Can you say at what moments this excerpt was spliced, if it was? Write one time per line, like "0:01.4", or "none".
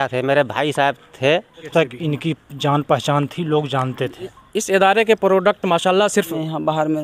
0:01.7
0:06.2